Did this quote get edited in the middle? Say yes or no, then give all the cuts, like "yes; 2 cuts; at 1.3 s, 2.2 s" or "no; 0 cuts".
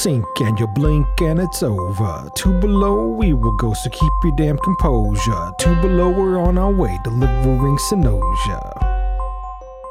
no; 0 cuts